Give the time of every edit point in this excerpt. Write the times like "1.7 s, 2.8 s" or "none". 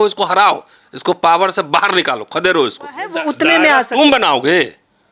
3.2 s